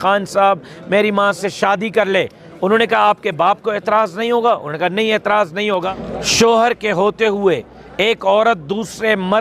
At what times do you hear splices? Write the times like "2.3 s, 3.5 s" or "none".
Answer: 5.8 s

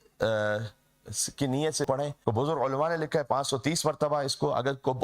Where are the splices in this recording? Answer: 1.9 s

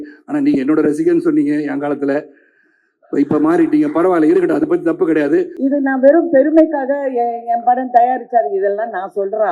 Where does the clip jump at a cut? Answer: 5.5 s

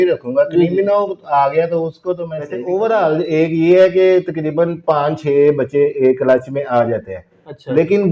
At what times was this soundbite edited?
2.6 s

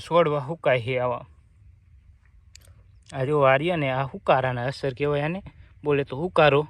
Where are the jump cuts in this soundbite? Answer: none

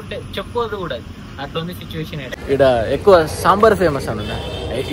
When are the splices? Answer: 2.3 s

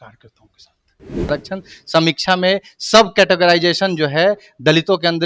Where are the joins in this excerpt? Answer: 1.3 s

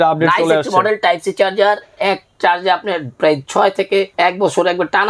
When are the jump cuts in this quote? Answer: 4.1 s

